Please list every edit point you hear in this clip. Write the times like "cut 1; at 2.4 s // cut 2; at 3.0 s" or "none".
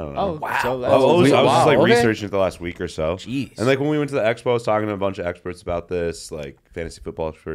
none